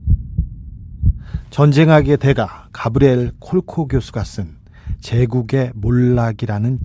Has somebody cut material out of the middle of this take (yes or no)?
yes